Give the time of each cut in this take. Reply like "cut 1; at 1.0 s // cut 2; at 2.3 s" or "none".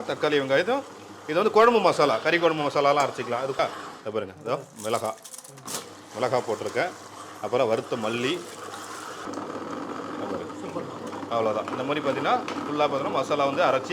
cut 1; at 3.6 s // cut 2; at 9.2 s

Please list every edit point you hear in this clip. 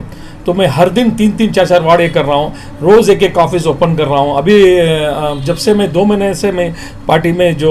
none

